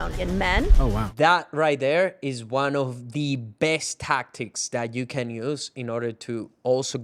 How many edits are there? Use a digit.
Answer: 1